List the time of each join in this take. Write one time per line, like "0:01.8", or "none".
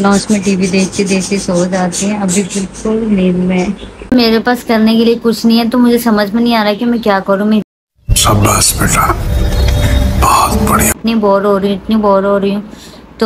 none